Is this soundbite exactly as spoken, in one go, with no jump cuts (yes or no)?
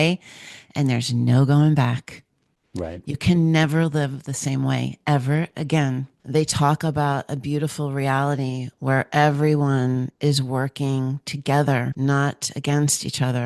no